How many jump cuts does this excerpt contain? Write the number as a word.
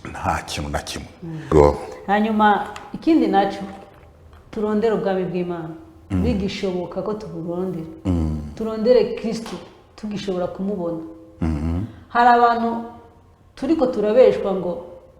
one